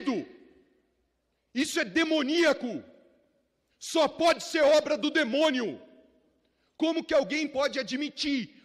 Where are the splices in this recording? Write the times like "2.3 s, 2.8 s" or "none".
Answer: none